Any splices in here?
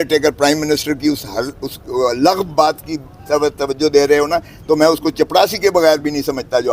no; 0 cuts

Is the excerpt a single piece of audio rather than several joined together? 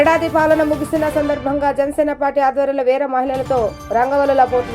yes; 0 cuts

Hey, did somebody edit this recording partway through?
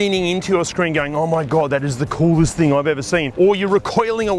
yes; 1 cut; at 3.3 s

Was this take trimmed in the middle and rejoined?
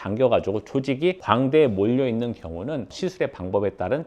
yes; 1 cut; at 2.9 s

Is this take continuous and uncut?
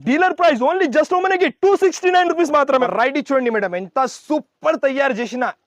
no; 1 cut; at 2.9 s

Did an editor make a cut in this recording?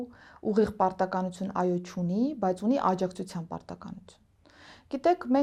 no; 0 cuts

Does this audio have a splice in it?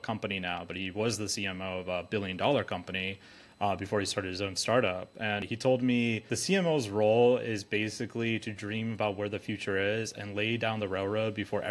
yes; 2 cuts; at 5.4 s, 6.3 s

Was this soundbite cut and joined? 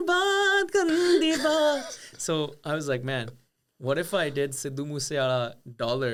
no; 0 cuts

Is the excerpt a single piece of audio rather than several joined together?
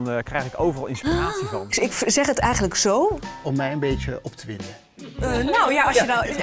no; 1 cut; at 1.7 s

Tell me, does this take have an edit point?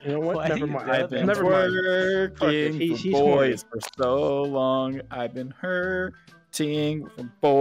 no; 0 cuts

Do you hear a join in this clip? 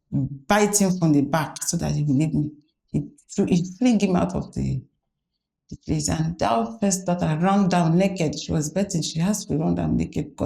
no; 0 cuts

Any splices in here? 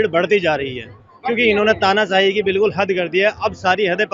no; 0 cuts

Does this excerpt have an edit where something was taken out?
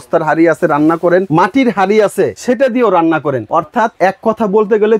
yes; 3 cuts; at 1.3 s, 2.4 s, 3.7 s

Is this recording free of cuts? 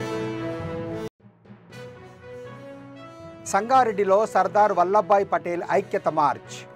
no; 1 cut; at 0.9 s

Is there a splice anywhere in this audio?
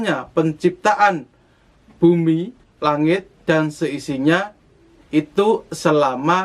yes; 1 cut; at 2.6 s

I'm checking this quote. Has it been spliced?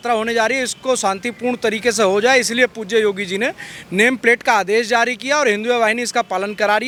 no; 0 cuts

